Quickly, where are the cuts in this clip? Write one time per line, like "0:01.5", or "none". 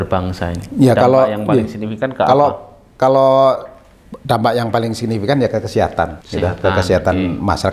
0:06.2